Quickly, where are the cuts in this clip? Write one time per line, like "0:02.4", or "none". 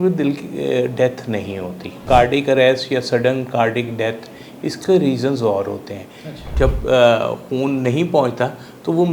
0:02.0
0:06.4